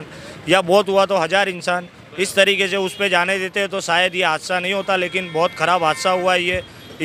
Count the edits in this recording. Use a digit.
0